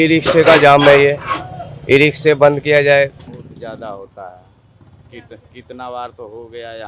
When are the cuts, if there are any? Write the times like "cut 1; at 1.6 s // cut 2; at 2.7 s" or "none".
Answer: cut 1; at 3.2 s